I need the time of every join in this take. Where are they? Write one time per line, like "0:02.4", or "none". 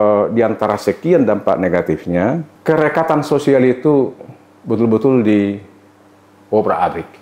0:02.5